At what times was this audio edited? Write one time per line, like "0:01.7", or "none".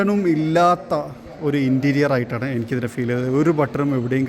none